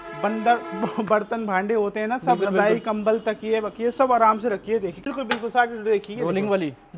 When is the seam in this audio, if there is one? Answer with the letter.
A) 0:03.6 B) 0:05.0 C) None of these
B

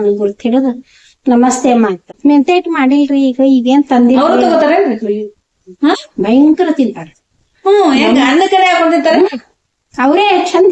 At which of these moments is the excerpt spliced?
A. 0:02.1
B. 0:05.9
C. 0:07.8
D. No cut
A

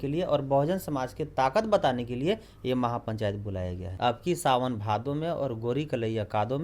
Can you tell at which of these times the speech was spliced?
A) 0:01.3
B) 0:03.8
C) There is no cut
B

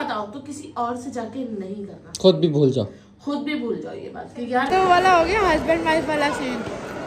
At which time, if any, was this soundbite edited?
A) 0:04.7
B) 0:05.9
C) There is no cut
A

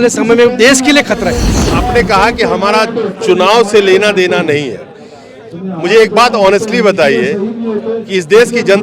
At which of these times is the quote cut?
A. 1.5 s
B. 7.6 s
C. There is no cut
A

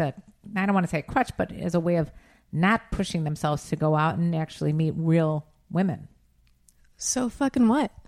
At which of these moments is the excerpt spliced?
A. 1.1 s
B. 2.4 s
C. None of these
C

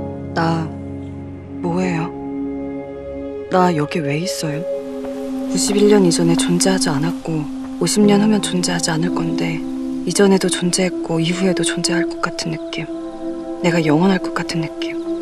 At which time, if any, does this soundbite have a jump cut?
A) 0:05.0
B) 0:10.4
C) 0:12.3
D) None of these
A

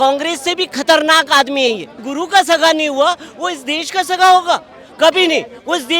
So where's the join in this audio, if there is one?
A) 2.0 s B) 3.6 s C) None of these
A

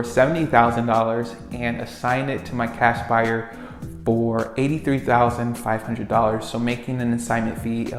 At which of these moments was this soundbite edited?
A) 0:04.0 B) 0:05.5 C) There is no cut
C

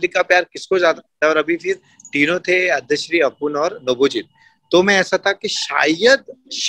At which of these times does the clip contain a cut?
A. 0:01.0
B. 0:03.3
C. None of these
C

